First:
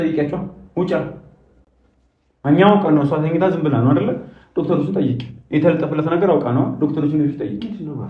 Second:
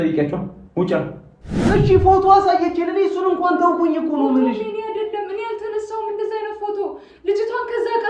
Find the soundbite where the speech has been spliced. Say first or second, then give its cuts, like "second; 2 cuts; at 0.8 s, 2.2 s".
second; 1 cut; at 1.6 s